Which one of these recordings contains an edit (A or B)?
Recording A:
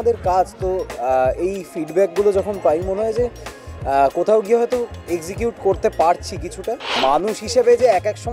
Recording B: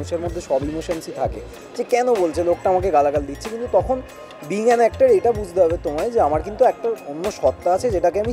A